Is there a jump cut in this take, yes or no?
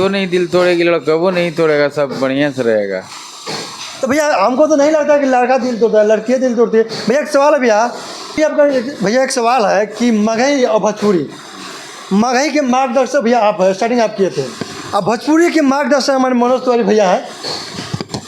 no